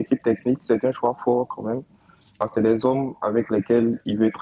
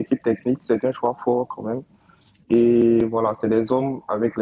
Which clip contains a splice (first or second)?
first